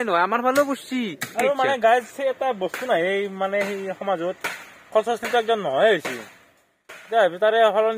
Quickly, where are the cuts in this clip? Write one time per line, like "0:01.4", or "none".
0:01.2